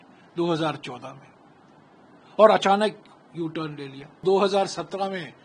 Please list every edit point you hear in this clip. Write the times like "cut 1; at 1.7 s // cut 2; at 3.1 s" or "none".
cut 1; at 4.2 s